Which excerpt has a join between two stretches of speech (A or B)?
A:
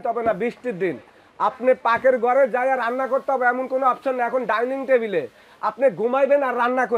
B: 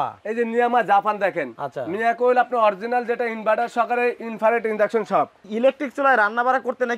B